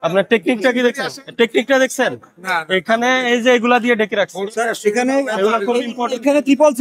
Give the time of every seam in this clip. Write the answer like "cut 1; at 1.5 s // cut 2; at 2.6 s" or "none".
none